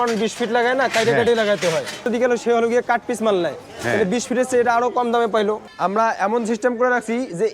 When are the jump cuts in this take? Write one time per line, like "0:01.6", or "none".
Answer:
0:02.1
0:05.7

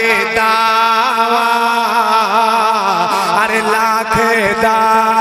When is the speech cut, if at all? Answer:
none

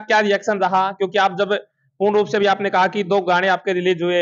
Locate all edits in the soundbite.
none

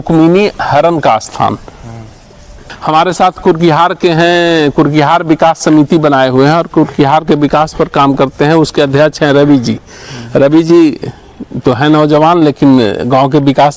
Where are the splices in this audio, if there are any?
none

